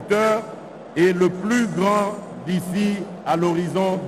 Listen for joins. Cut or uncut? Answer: uncut